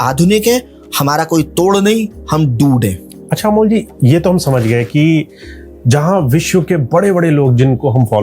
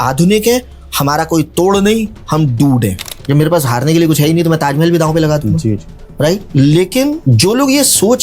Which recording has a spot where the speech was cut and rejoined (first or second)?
second